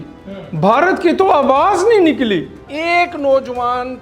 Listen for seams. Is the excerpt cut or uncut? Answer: cut